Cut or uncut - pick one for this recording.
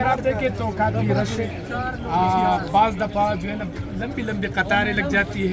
uncut